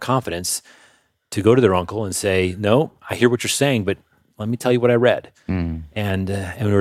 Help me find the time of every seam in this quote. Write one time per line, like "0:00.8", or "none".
none